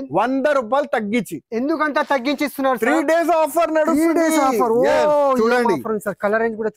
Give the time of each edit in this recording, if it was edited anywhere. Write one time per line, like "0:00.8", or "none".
none